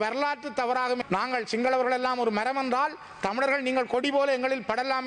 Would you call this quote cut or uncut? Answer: cut